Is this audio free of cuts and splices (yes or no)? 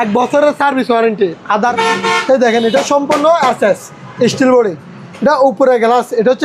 no